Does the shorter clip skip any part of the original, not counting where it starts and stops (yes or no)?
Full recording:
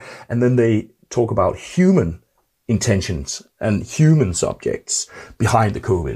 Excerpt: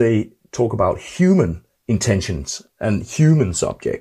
yes